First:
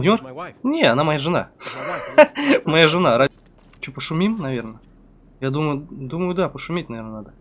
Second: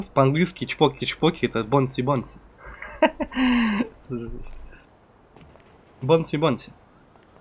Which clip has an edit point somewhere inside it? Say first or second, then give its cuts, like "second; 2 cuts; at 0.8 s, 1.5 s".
first; 1 cut; at 3.3 s